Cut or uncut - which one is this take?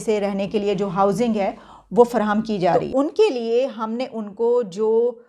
cut